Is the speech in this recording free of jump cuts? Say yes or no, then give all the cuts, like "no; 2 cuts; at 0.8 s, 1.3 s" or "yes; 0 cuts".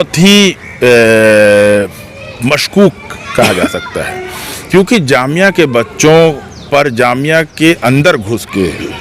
yes; 0 cuts